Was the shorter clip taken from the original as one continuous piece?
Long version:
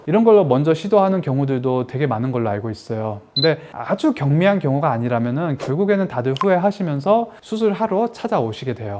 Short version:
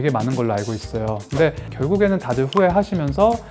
no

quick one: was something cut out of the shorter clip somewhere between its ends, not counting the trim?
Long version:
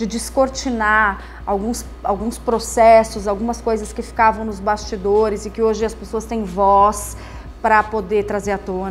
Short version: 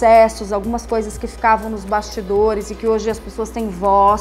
no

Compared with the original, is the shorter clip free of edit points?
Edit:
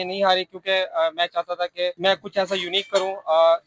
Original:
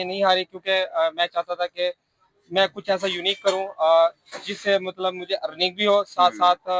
no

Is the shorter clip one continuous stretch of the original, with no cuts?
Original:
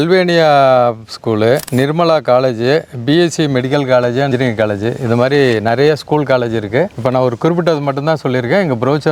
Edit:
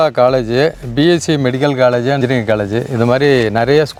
yes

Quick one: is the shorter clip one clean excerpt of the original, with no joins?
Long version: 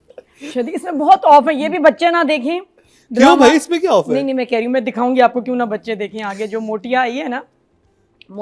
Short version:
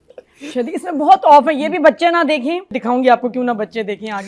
no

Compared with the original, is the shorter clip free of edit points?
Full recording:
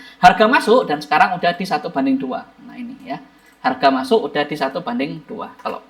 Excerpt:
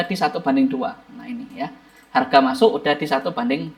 yes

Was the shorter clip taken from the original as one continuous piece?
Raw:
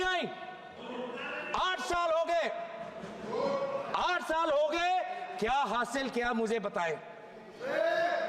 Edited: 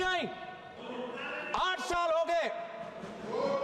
yes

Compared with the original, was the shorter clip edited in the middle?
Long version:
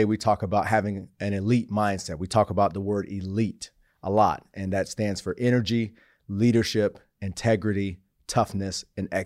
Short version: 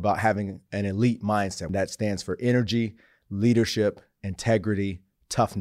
yes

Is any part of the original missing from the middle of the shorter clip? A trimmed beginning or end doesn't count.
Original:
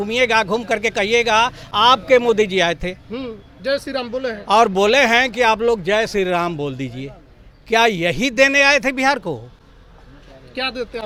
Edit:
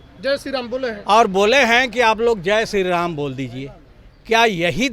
no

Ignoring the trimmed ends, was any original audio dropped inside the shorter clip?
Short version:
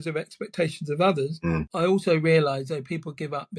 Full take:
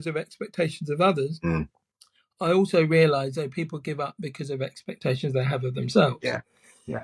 yes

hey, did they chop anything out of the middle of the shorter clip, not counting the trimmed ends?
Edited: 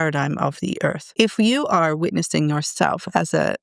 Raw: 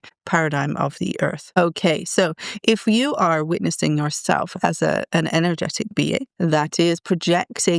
yes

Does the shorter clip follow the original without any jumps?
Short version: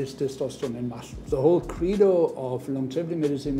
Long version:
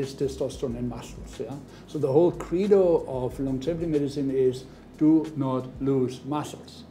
no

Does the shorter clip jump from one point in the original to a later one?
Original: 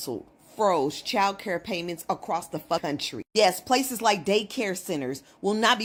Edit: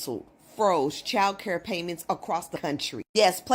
yes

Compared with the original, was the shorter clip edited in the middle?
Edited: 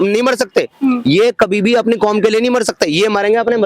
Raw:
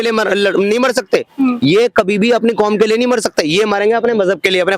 no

